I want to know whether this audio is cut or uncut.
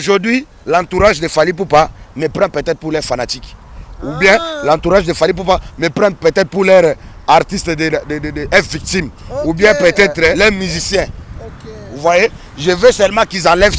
cut